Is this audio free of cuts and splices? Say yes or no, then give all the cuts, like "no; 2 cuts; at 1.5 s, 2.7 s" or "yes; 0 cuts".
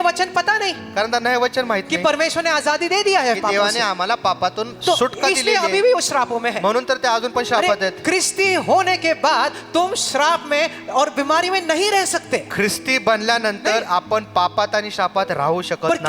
yes; 0 cuts